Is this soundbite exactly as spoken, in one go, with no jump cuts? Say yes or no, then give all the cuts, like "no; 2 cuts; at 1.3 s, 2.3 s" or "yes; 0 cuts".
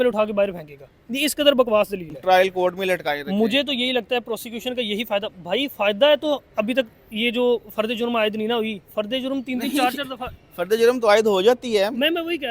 no; 1 cut; at 2.1 s